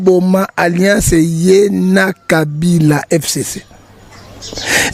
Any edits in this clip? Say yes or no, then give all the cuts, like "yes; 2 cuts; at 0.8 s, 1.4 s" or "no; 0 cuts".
no; 0 cuts